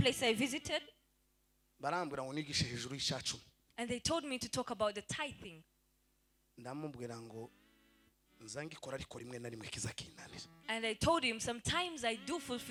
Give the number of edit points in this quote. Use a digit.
0